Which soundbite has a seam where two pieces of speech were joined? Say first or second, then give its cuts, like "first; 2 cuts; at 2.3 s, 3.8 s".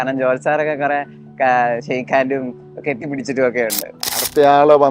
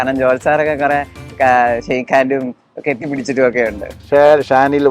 second; 1 cut; at 4.0 s